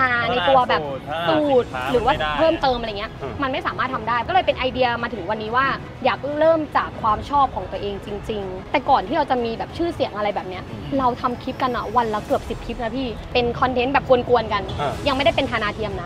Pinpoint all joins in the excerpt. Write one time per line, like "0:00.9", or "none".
0:04.3
0:05.9
0:08.6
0:13.2